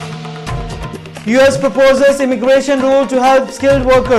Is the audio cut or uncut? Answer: cut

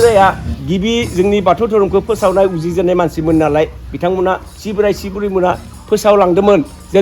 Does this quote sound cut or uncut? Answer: uncut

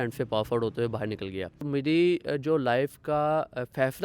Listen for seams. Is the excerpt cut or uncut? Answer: cut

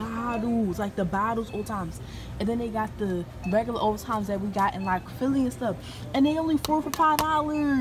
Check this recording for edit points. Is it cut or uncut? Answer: uncut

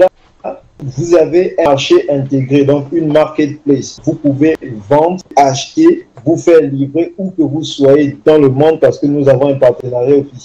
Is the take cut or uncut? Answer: cut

